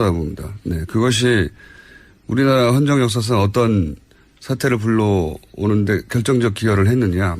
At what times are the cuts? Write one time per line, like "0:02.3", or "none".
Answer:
0:03.8